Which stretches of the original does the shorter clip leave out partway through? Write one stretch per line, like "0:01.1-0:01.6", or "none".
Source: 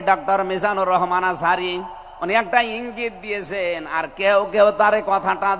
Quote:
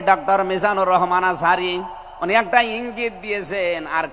none